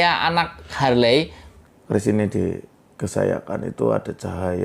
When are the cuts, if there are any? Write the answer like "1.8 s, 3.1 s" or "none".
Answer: 1.4 s